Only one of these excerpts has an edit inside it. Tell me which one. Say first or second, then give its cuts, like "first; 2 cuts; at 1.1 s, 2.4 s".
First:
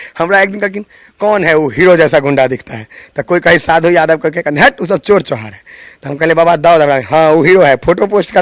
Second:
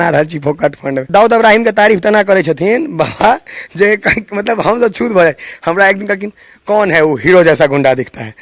second; 1 cut; at 1.1 s